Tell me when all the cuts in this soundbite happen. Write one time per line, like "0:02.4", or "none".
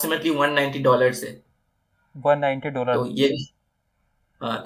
none